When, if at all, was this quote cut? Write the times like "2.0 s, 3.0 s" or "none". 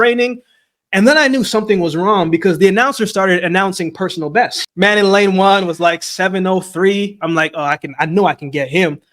4.6 s